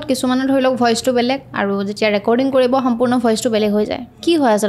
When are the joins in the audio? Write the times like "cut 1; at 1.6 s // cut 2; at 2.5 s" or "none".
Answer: none